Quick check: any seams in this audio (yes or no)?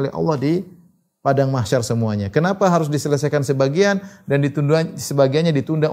no